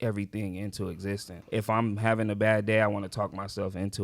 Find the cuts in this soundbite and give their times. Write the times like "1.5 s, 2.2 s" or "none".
1.3 s